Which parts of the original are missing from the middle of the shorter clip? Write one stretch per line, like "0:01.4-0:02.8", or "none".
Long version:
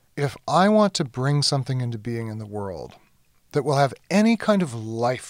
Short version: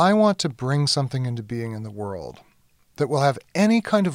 none